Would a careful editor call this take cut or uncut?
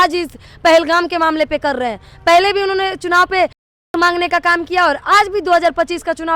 uncut